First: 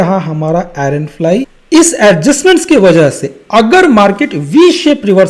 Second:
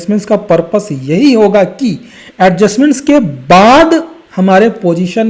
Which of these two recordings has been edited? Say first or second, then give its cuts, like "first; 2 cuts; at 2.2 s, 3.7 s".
first; 1 cut; at 1.6 s